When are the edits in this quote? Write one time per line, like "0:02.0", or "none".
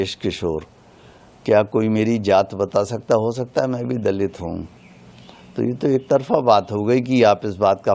none